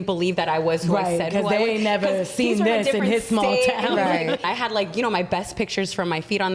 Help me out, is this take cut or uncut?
cut